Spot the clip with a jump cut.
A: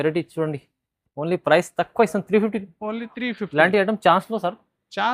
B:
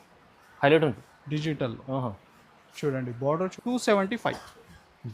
B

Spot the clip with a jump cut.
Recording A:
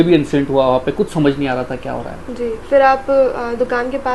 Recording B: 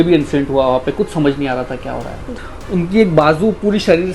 B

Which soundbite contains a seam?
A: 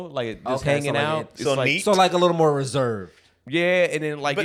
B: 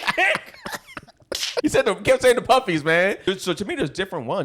B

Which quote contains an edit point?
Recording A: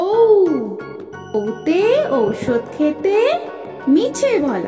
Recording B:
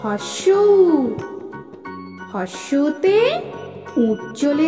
A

